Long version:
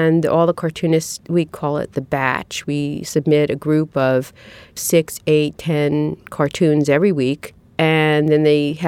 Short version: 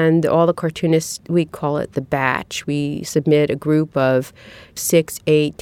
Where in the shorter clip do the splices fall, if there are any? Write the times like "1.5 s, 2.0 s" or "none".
none